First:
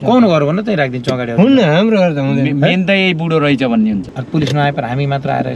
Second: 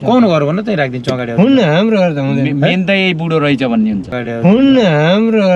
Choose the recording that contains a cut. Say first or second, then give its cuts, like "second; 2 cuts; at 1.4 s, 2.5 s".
first; 1 cut; at 4.1 s